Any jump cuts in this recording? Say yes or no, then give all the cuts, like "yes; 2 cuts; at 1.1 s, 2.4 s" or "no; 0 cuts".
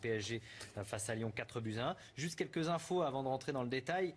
yes; 1 cut; at 2.0 s